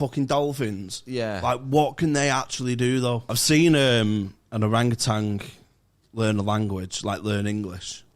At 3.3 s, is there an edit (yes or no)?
yes